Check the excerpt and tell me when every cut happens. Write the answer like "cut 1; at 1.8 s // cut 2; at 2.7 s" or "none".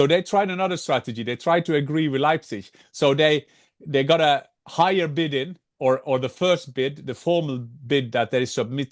none